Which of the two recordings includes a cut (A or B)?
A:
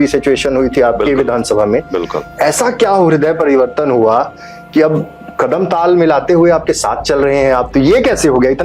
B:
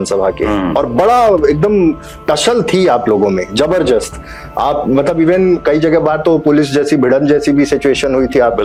A